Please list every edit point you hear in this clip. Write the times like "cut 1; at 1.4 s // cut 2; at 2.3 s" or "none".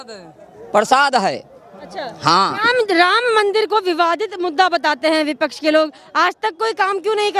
none

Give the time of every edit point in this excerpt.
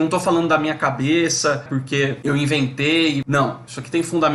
cut 1; at 1.7 s // cut 2; at 3.2 s

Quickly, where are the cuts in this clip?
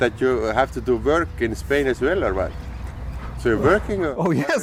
none

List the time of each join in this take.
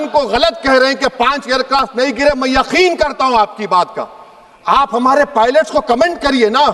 none

